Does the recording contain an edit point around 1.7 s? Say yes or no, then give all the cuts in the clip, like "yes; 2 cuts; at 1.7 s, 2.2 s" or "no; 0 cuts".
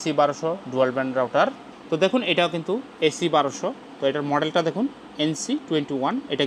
yes; 1 cut; at 1.7 s